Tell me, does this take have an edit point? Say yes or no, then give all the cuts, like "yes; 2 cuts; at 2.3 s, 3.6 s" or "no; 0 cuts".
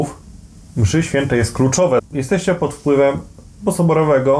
yes; 1 cut; at 2.0 s